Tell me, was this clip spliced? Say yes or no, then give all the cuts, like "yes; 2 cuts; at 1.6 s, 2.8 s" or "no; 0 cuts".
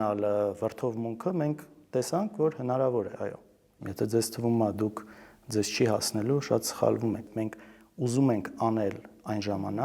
yes; 2 cuts; at 3.8 s, 7.3 s